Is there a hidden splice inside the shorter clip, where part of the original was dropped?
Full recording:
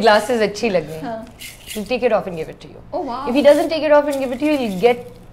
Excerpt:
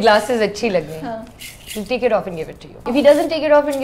yes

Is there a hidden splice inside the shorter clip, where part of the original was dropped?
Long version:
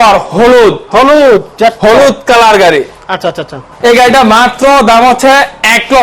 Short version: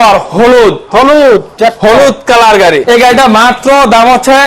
yes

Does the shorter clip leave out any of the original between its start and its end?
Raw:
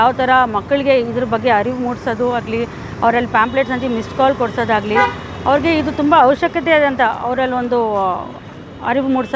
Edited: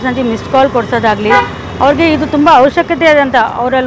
no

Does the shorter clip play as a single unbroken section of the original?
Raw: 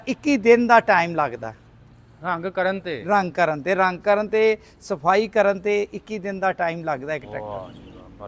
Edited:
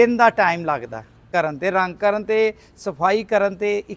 no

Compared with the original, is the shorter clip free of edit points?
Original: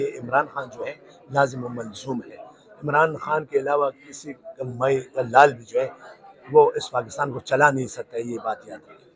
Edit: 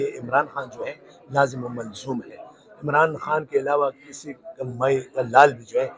yes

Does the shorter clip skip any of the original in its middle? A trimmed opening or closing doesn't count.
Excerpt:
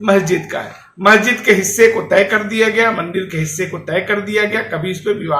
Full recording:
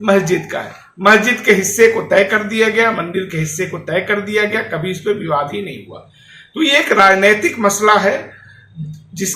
no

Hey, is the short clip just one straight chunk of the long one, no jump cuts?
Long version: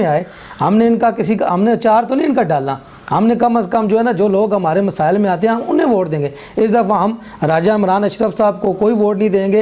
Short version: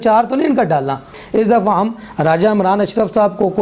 no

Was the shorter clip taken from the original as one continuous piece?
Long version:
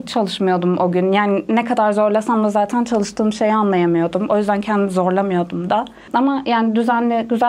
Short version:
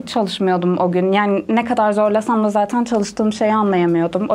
yes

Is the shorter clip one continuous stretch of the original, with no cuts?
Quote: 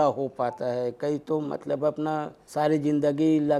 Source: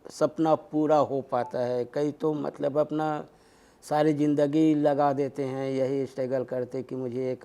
no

